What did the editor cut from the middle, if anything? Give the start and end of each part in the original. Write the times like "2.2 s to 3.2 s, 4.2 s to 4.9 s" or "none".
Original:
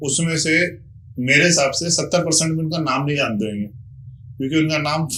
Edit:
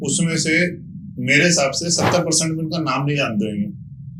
none